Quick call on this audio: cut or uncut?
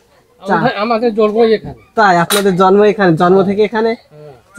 uncut